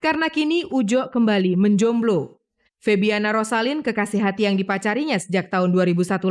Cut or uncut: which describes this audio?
uncut